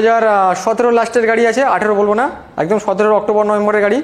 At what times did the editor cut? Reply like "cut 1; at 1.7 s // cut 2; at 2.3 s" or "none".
none